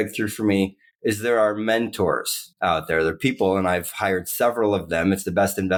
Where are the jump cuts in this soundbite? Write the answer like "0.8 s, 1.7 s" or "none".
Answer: none

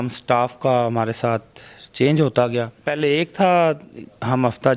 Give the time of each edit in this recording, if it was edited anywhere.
2.8 s

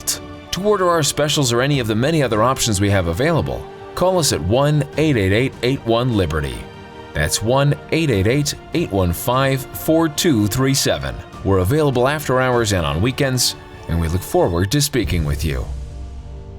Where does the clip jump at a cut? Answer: 15.7 s

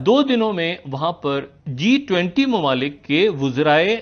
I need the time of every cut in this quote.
1.5 s

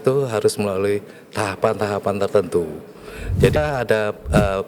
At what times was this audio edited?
3.6 s

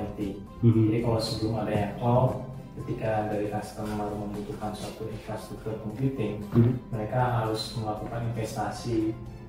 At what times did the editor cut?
none

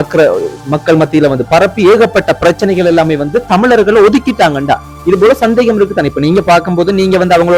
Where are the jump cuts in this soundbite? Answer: none

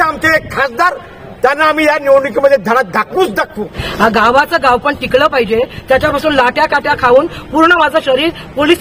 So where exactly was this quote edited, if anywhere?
3.8 s

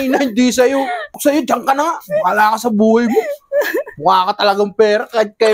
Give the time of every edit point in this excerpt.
1.2 s

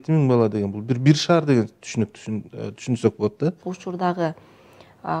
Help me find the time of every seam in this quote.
3.7 s

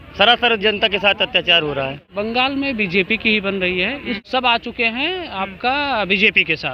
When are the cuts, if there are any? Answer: 2.0 s, 4.2 s

